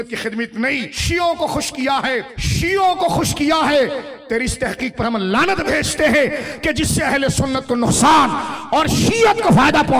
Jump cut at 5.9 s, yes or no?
no